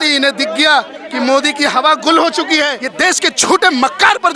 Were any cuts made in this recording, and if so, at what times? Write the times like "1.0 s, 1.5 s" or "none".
2.8 s